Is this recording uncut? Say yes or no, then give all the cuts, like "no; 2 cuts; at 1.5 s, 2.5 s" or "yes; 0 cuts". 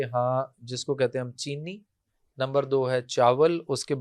yes; 0 cuts